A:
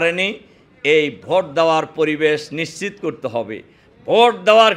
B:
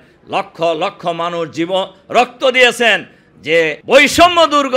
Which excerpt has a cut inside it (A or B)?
B